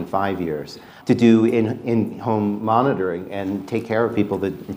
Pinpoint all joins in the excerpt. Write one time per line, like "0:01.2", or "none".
0:01.0